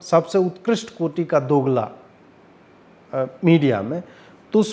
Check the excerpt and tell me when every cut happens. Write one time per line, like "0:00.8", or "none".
none